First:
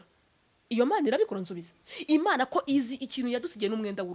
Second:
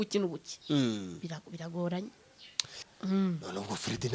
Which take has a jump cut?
second; 1 cut; at 2.9 s

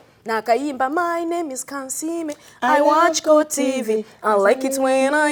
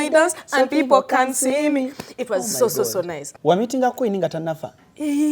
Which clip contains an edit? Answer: second; 1 cut; at 3.2 s

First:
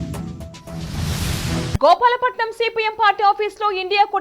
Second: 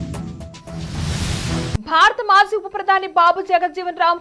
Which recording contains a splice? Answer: first; 1 cut; at 1.7 s

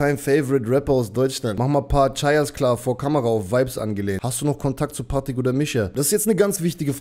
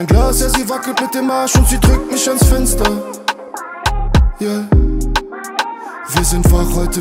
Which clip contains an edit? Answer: first; 3 cuts; at 1.6 s, 4.3 s, 5.9 s

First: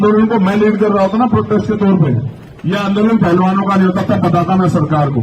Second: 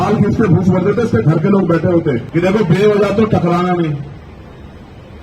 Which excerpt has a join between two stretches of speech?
second; 1 cut; at 2.2 s

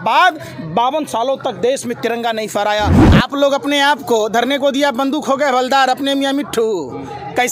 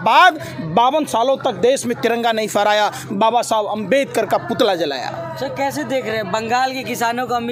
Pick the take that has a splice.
first; 1 cut; at 3.0 s

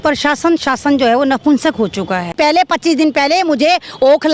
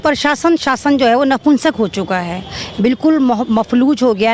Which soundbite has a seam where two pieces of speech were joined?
first; 1 cut; at 2.4 s

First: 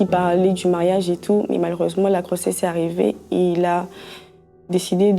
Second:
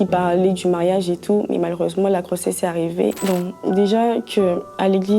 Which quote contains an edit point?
second; 1 cut; at 3.2 s

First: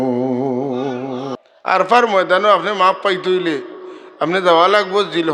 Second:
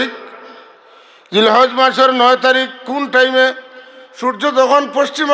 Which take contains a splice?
first; 1 cut; at 1.4 s

